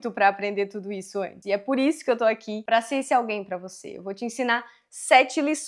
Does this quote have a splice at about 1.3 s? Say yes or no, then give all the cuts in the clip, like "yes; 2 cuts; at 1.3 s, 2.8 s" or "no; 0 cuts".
yes; 2 cuts; at 1.3 s, 2.5 s